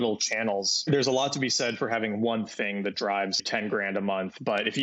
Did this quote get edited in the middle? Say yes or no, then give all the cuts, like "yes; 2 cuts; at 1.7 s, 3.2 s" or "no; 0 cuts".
yes; 2 cuts; at 0.9 s, 3.4 s